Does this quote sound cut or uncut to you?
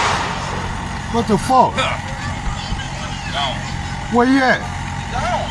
uncut